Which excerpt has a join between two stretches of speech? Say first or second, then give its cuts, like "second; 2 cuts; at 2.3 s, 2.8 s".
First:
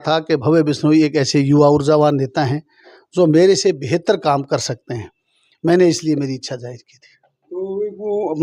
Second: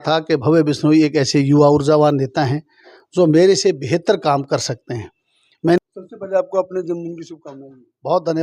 second; 1 cut; at 5.8 s